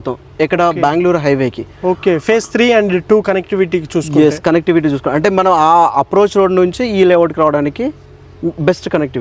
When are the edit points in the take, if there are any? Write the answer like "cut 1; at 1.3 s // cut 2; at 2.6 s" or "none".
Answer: none

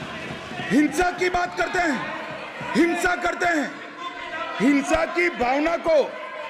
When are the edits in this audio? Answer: none

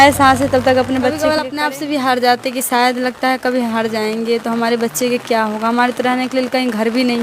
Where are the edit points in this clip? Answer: cut 1; at 1.4 s

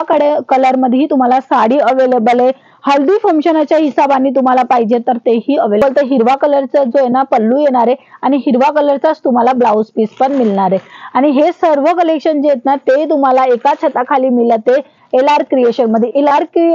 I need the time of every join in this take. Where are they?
cut 1; at 5.8 s

